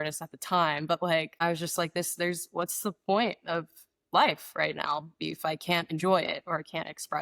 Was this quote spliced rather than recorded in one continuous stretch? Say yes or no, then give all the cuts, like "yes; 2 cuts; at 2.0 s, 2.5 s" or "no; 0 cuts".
no; 0 cuts